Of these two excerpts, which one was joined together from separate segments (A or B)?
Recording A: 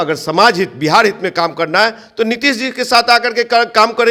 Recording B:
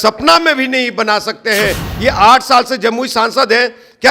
B